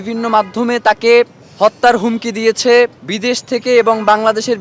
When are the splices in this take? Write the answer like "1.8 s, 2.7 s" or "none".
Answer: 1.4 s, 3.1 s